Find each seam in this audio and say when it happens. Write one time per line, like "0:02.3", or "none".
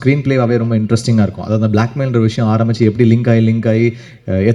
none